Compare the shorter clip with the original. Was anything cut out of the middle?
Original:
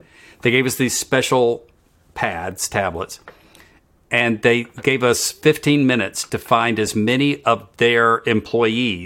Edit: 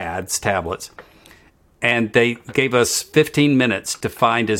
no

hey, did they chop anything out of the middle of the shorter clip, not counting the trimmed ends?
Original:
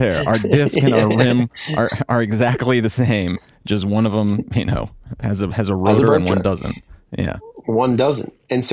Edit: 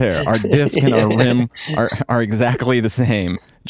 no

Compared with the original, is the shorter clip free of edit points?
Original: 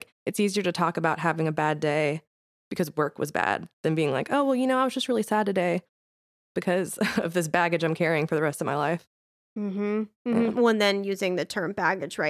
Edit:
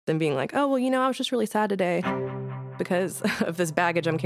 yes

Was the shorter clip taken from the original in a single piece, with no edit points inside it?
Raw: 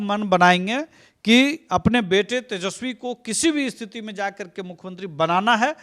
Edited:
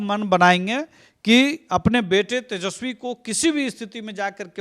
yes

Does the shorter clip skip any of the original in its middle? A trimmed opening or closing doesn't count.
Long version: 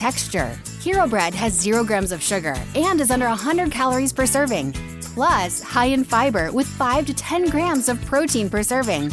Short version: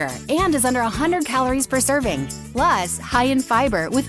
yes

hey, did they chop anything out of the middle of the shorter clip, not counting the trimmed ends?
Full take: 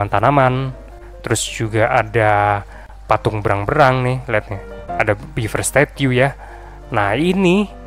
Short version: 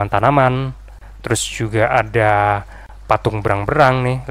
no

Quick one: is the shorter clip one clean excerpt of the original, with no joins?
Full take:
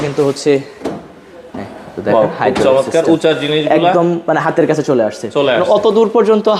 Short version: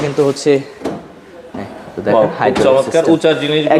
yes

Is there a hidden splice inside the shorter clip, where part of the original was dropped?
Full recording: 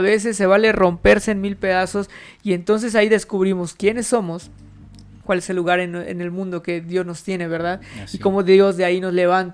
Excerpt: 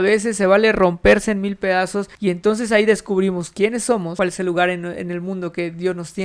yes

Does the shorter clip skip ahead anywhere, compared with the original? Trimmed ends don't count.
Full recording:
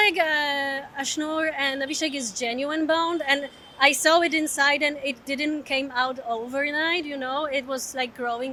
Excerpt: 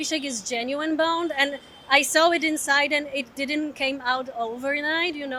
no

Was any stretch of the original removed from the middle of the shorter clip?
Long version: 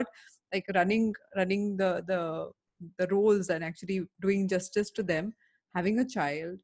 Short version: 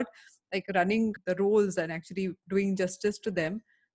yes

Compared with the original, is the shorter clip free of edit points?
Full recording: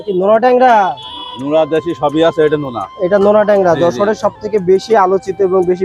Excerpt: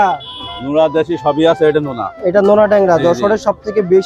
yes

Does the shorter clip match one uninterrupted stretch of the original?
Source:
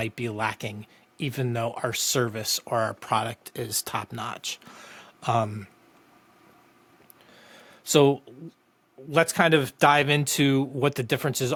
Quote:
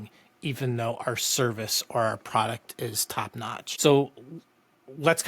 no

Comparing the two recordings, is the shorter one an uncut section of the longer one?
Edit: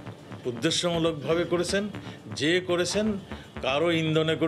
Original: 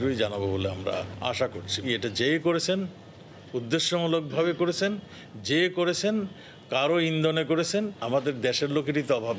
yes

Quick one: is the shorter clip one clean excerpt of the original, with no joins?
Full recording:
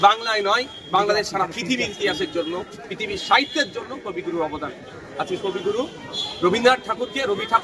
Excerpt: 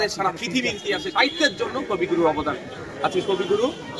no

